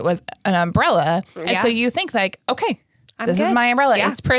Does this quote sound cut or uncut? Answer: uncut